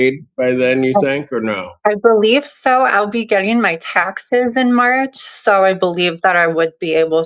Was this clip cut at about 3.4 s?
no; 0 cuts

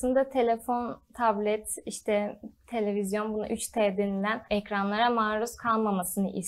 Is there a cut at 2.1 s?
no; 1 cut; at 4.4 s

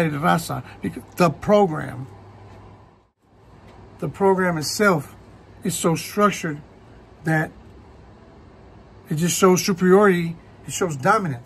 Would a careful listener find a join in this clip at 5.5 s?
no; 1 cut; at 3.1 s

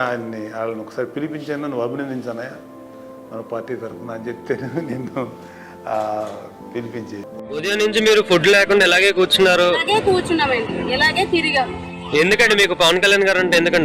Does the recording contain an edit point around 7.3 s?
yes; 1 cut; at 7.3 s

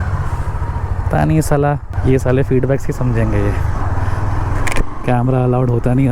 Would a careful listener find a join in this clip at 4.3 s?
no; 1 cut; at 1.9 s

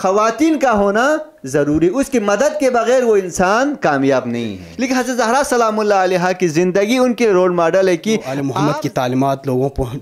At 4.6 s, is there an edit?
yes; 2 cuts; at 4.6 s, 8.4 s

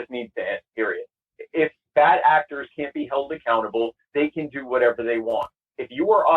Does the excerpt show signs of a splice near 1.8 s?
yes; 1 cut; at 1.8 s

